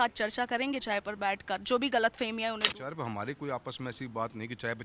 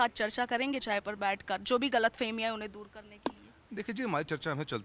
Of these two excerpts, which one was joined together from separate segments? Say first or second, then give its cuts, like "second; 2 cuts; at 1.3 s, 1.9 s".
first; 1 cut; at 2.8 s